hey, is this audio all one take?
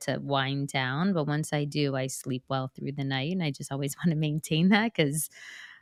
yes; 0 cuts

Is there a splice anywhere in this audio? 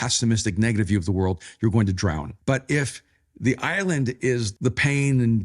yes; 2 cuts; at 2.3 s, 4.5 s

